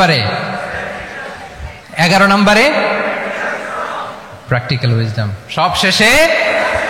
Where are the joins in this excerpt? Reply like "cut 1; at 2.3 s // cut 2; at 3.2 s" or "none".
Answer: cut 1; at 1.8 s